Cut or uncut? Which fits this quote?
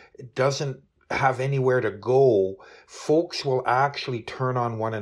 uncut